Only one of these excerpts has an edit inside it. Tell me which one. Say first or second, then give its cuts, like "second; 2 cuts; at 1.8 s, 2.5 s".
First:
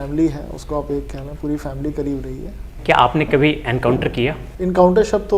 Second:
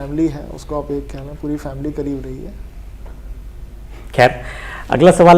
first; 2 cuts; at 2.7 s, 4.5 s